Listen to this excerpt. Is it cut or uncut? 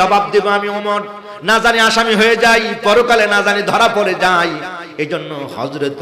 uncut